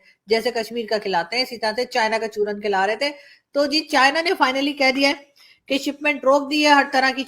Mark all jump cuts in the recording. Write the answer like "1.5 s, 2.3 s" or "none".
none